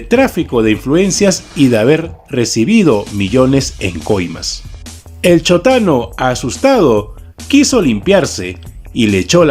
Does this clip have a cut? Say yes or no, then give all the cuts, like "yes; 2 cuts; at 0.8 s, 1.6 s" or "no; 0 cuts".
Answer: yes; 1 cut; at 7.8 s